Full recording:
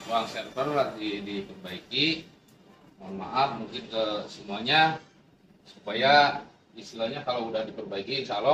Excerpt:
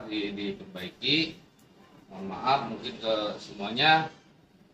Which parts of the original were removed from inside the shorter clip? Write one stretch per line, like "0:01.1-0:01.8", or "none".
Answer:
none